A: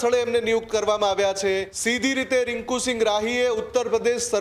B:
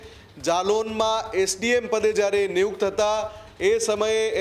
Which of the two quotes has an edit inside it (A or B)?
A